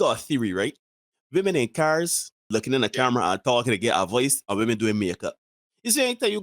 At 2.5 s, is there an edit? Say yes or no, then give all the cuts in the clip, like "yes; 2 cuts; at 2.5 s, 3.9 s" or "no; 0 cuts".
yes; 1 cut; at 2.5 s